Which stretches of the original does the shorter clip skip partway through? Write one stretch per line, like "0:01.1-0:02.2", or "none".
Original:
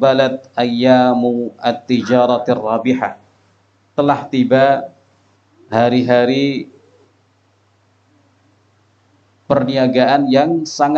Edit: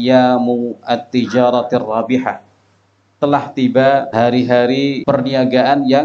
0:04.8-0:05.7
0:06.6-0:09.4